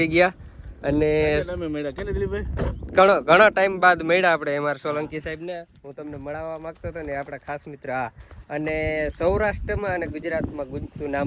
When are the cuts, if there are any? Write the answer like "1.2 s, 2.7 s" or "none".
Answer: none